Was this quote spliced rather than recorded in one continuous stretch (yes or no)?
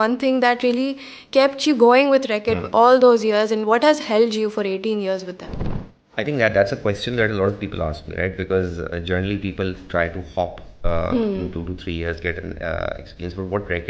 no